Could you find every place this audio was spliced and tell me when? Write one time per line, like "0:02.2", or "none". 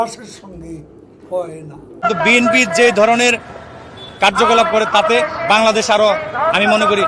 0:01.8